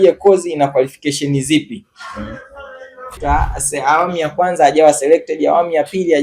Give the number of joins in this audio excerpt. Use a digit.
1